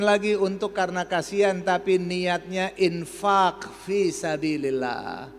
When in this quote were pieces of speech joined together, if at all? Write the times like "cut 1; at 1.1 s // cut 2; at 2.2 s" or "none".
none